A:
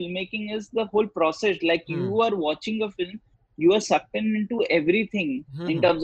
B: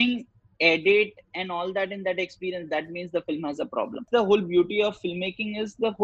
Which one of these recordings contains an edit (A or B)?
B